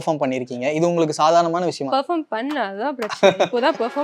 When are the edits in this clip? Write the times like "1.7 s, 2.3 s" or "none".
1.9 s